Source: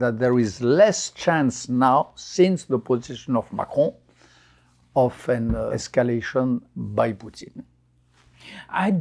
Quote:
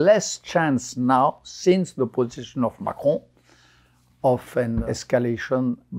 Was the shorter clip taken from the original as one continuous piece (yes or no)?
no